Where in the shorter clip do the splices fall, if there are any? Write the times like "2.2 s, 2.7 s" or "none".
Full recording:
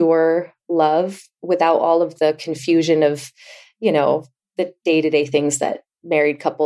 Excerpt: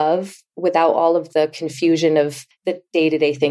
2.5 s